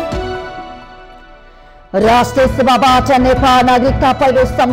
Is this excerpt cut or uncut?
uncut